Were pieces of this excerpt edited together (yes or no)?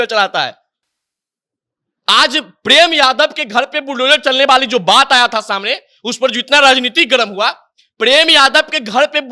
no